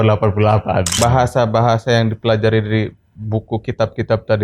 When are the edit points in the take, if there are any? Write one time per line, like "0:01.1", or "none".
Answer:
0:01.0